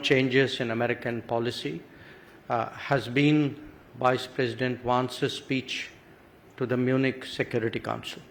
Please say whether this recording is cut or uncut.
uncut